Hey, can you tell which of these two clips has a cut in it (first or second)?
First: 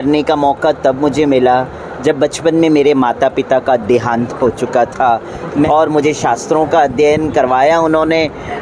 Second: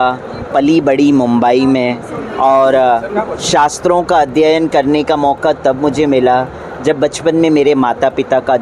first